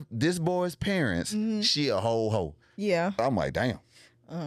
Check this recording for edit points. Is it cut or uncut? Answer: uncut